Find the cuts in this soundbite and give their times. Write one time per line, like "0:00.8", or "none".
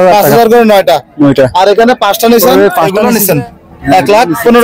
0:03.0